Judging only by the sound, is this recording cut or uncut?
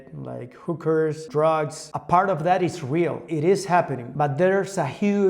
cut